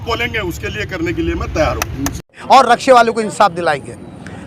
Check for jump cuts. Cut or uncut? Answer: cut